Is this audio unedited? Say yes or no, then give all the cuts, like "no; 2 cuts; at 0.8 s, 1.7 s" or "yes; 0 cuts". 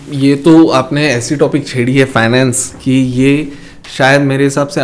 yes; 0 cuts